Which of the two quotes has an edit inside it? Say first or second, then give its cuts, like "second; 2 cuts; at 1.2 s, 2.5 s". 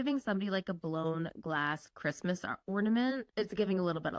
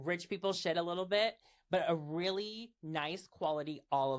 first; 1 cut; at 3.3 s